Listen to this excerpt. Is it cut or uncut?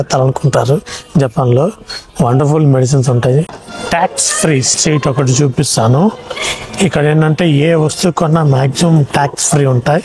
cut